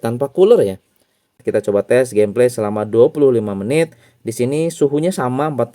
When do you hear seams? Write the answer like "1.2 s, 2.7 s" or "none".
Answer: 1.4 s

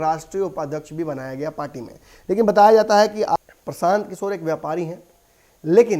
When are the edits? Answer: 3.4 s

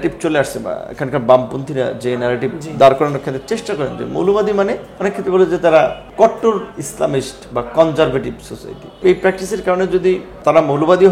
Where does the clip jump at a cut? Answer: 4.9 s, 6.0 s, 9.0 s, 10.3 s

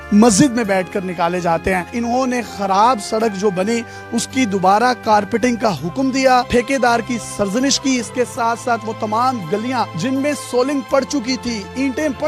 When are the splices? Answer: none

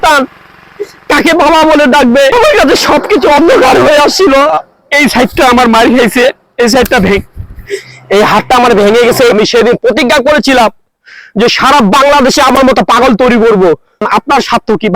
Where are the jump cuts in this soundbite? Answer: 2.3 s, 9.3 s, 14.1 s

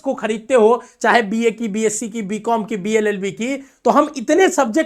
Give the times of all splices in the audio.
none

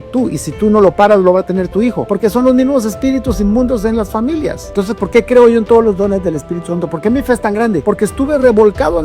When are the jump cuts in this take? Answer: 2.1 s, 4.6 s, 7.8 s

